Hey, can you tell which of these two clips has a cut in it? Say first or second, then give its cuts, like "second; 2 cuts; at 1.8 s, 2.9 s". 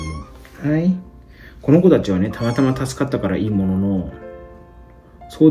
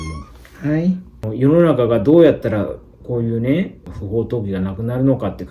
second; 2 cuts; at 1.2 s, 3.9 s